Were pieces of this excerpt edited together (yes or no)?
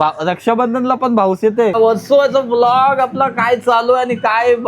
yes